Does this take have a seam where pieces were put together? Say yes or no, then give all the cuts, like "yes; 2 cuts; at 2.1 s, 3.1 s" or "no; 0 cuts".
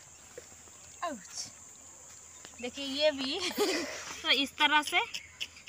yes; 1 cut; at 4.2 s